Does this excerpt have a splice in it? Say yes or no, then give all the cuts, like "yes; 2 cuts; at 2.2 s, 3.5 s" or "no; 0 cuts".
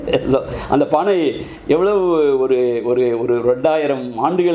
no; 0 cuts